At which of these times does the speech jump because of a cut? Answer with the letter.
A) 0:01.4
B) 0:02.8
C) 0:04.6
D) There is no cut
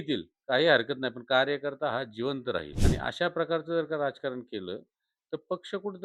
B